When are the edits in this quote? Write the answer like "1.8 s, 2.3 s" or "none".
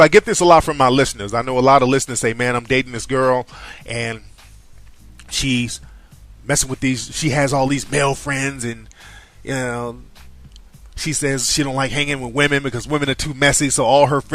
12.1 s